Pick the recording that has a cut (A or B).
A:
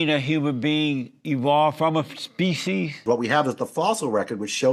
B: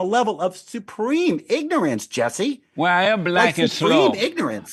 A